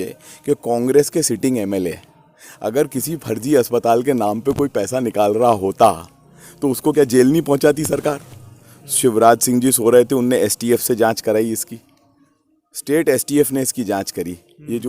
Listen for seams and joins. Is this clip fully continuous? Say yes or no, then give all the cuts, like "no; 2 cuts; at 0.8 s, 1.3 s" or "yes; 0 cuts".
yes; 0 cuts